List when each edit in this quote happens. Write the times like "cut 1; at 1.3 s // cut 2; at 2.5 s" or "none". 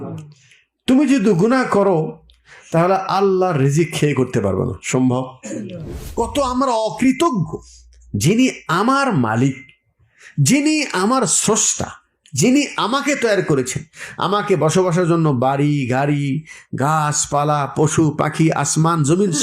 cut 1; at 6.0 s